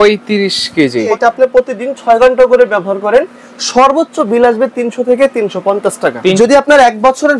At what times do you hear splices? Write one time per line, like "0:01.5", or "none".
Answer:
0:01.1
0:06.4